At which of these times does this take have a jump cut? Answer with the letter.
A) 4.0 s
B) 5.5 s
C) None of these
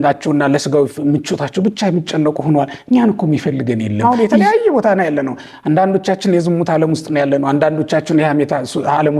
A